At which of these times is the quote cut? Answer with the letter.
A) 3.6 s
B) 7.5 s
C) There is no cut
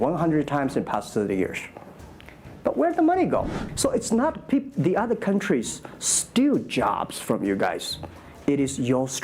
A